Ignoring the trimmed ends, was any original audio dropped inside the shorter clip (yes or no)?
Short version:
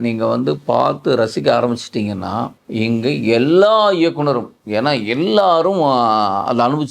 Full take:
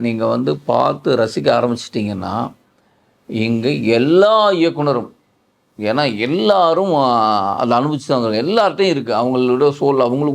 yes